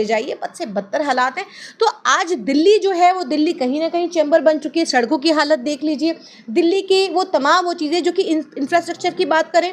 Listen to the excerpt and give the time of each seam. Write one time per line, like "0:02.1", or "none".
0:01.6